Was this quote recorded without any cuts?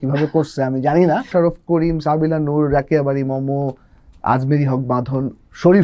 no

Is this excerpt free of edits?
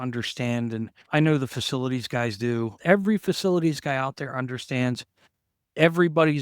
no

